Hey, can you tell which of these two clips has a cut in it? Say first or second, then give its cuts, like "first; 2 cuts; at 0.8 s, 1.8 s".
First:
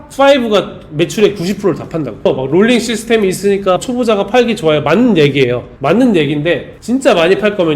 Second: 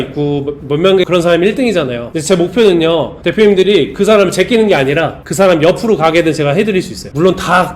first; 2 cuts; at 2.2 s, 3.8 s